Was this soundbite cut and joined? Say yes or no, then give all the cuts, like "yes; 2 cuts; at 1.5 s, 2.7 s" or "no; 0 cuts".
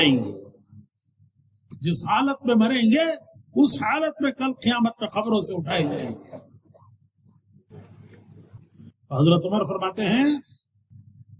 yes; 1 cut; at 8.5 s